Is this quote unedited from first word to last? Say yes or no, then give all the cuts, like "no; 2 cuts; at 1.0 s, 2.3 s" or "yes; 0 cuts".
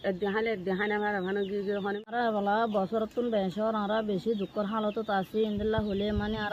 no; 1 cut; at 2.1 s